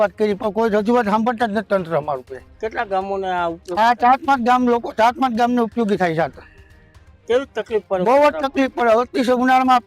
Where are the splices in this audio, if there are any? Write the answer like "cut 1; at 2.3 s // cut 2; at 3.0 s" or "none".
none